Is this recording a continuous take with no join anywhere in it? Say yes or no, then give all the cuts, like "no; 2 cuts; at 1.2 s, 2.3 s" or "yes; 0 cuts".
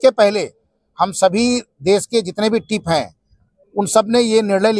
yes; 0 cuts